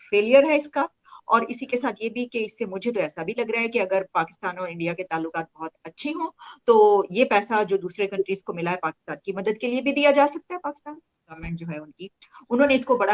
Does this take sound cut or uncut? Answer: cut